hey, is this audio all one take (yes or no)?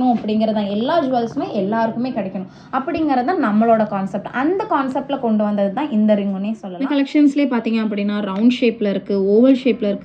no